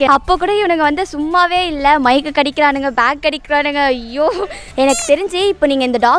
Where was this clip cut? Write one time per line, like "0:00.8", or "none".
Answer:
0:04.7